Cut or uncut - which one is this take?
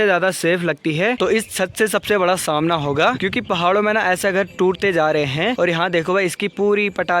cut